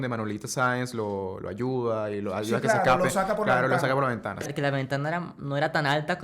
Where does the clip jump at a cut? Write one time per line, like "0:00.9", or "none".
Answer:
0:04.5